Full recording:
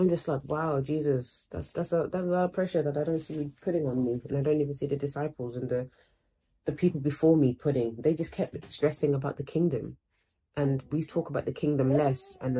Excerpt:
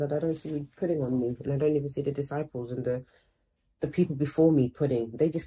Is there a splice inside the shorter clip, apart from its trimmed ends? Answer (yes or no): no